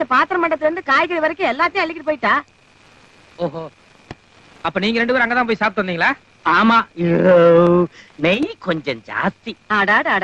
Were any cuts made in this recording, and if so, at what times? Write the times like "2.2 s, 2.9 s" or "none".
none